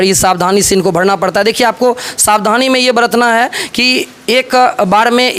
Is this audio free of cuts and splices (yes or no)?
yes